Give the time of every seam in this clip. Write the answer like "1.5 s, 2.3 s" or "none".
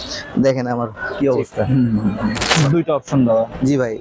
2.5 s